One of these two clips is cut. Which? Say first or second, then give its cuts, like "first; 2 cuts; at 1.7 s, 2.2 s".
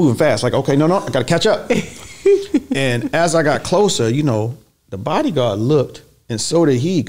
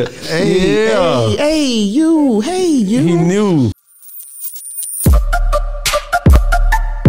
second; 1 cut; at 3.7 s